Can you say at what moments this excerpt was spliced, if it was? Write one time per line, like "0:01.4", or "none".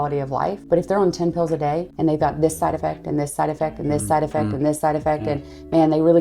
none